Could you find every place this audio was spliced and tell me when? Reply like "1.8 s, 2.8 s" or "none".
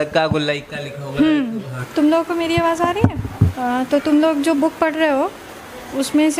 1.8 s, 3.5 s